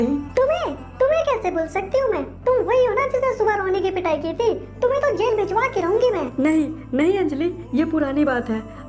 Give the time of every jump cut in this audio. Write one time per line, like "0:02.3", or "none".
0:06.3